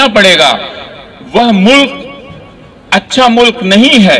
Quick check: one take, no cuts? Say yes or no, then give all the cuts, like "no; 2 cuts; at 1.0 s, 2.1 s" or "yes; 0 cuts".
yes; 0 cuts